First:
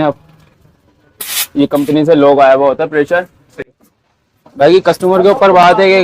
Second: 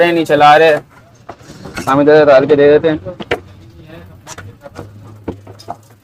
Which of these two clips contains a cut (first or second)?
first